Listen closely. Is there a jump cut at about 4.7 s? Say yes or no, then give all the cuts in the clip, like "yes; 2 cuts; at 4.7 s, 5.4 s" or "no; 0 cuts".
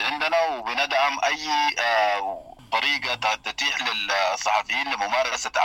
no; 1 cut; at 2.6 s